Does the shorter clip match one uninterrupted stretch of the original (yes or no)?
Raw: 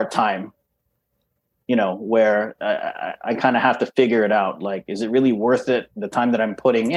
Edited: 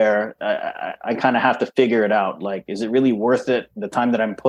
yes